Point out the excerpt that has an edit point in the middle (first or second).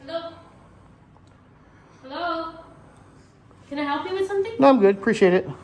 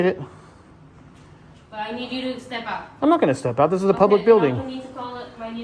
second